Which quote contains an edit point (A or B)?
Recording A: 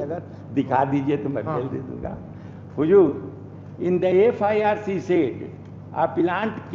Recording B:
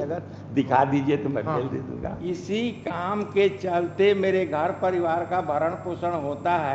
B